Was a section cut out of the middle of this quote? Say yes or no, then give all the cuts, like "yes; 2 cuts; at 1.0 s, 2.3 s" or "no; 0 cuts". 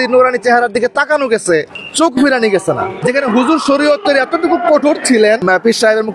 yes; 1 cut; at 3.0 s